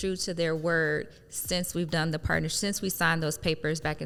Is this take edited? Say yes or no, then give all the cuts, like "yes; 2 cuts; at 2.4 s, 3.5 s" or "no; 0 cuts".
no; 0 cuts